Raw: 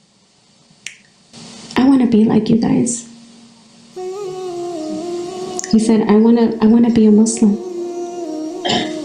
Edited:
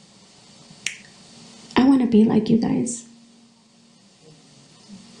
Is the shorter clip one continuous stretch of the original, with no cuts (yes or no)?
yes